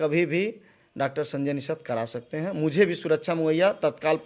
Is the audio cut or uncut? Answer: uncut